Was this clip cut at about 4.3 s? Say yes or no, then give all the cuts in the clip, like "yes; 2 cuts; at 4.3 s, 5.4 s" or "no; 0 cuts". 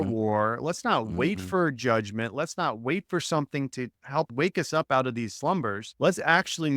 yes; 2 cuts; at 4.3 s, 5.8 s